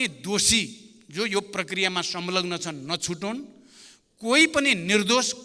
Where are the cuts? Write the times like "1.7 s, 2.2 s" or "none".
none